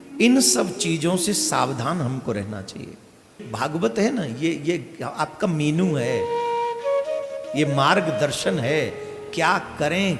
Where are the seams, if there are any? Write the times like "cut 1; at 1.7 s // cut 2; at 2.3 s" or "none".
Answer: cut 1; at 3.5 s